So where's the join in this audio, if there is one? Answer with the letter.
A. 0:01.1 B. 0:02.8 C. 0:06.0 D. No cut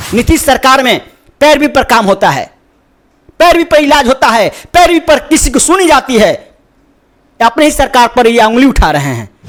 D